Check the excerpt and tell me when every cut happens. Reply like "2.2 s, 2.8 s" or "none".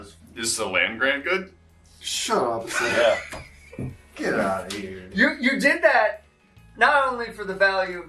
none